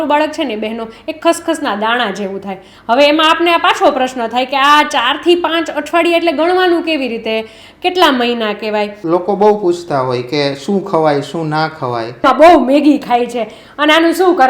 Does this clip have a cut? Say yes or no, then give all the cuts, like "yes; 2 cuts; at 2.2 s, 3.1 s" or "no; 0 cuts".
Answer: yes; 2 cuts; at 9.0 s, 12.2 s